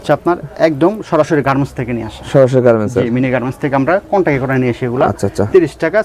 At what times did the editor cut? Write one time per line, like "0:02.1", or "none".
none